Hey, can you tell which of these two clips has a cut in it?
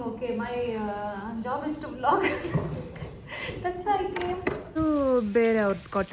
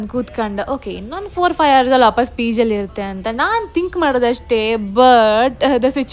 first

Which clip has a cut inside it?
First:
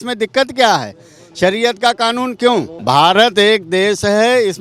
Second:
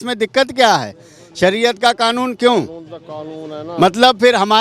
first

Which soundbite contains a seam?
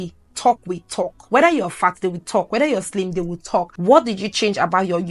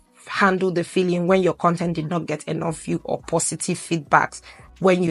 first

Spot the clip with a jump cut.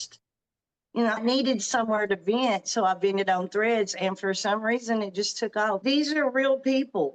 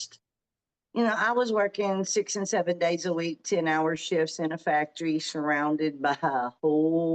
first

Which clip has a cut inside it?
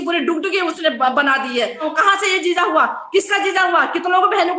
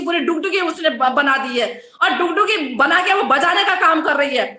first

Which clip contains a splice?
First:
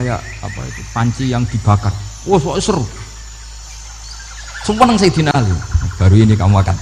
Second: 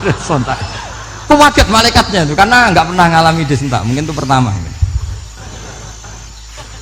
first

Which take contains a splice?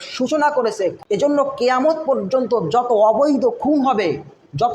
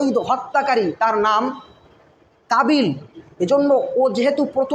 first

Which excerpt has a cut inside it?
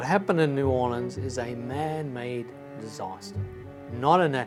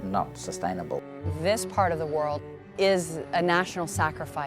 second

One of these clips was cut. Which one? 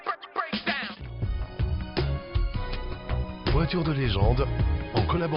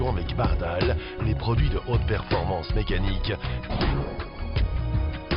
first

